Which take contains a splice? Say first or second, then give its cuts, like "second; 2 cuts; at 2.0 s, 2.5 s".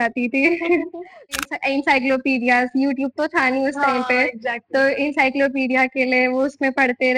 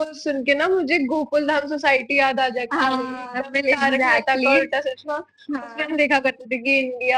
first; 1 cut; at 1.4 s